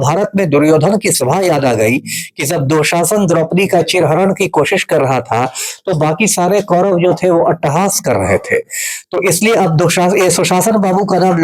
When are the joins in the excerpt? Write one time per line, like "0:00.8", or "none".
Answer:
none